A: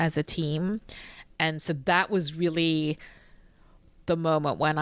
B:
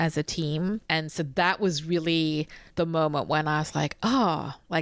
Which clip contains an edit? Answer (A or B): B